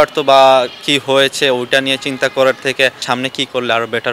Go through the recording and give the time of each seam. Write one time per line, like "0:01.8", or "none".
0:03.0